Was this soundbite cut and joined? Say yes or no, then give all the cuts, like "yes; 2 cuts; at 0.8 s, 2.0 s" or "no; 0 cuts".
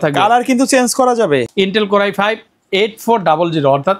yes; 1 cut; at 1.5 s